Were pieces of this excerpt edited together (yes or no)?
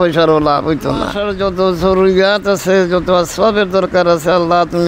yes